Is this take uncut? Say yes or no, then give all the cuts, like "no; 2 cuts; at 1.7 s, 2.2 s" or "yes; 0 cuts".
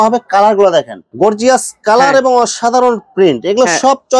no; 1 cut; at 1.0 s